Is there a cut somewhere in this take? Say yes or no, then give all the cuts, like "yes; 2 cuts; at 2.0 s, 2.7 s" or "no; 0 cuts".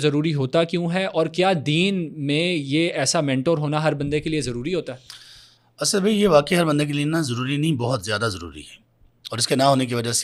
no; 0 cuts